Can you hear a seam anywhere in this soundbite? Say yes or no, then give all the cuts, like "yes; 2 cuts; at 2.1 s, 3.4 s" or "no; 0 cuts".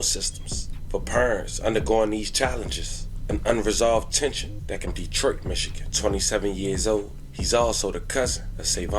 yes; 1 cut; at 4.9 s